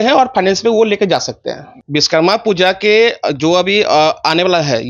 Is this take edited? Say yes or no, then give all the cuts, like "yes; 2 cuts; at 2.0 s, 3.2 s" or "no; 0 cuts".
yes; 1 cut; at 1.7 s